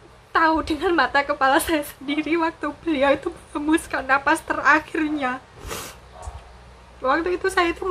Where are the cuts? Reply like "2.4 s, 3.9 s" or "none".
none